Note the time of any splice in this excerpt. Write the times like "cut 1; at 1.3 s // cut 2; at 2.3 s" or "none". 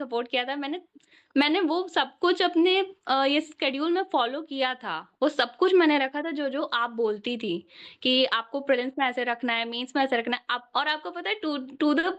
none